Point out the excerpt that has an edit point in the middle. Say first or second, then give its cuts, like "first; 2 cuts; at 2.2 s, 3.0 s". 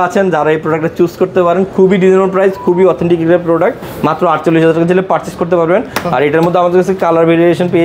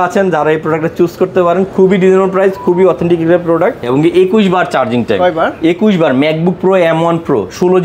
second; 1 cut; at 3.8 s